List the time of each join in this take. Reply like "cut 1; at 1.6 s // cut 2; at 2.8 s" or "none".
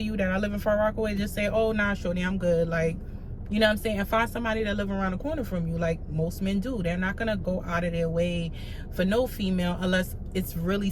none